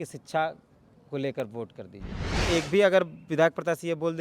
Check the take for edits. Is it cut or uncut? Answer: cut